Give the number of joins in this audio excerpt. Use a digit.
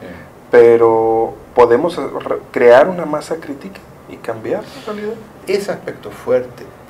1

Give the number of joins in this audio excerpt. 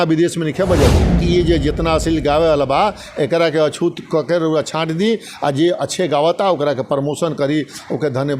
1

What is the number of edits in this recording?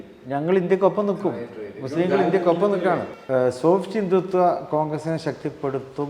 1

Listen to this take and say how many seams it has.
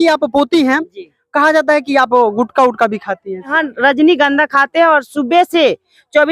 1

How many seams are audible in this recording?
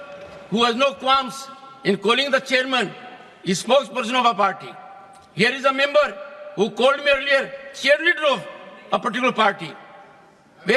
0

